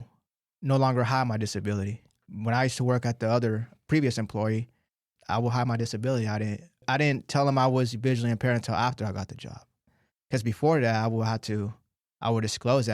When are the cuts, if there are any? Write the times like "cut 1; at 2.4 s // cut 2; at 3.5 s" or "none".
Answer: cut 1; at 5.1 s // cut 2; at 6.8 s